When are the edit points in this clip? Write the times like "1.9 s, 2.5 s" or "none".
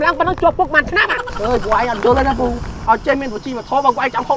1.2 s